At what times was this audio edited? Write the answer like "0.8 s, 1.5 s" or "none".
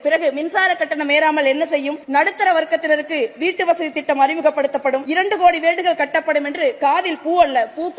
2.0 s, 5.0 s